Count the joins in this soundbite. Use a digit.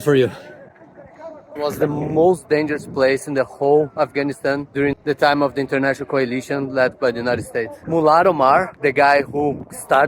2